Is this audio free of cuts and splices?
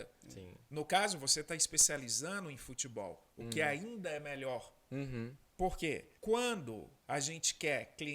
no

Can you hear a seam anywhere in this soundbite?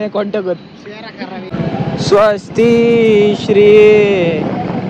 yes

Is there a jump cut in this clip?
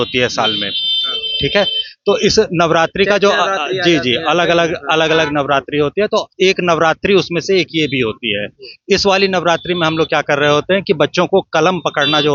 no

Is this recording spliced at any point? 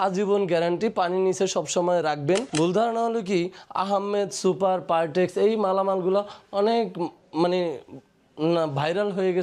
yes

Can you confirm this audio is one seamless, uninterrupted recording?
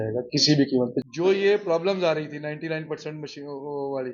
no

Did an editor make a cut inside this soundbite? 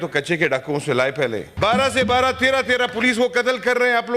yes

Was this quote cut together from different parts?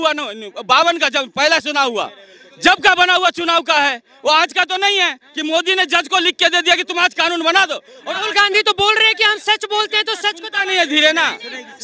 no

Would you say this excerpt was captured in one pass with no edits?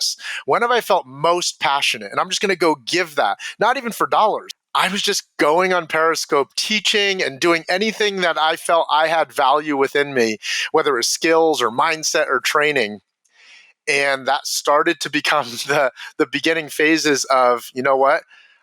no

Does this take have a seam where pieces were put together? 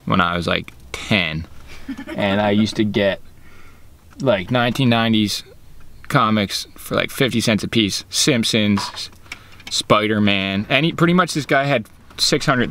no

